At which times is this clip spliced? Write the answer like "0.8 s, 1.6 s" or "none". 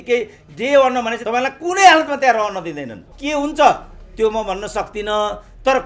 1.2 s, 3.2 s